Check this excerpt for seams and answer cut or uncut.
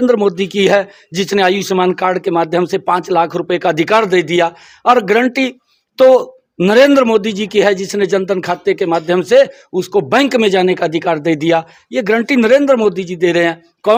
uncut